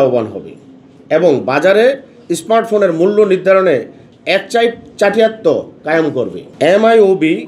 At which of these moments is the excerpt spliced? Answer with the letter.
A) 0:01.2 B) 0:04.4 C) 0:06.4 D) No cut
C